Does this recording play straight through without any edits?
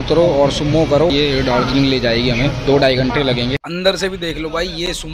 no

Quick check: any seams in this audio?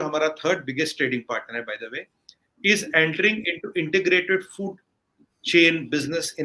no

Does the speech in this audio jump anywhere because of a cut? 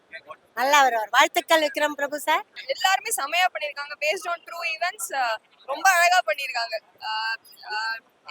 yes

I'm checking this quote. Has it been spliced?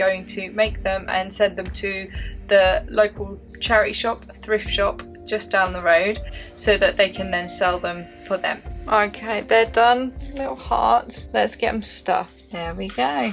yes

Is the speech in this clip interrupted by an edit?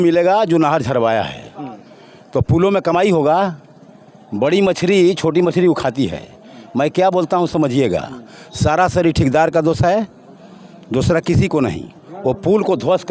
no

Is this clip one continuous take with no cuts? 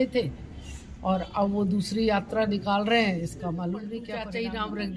no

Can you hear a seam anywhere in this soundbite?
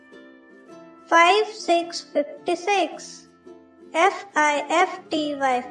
yes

